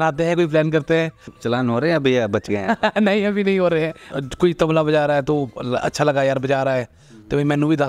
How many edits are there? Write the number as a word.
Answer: two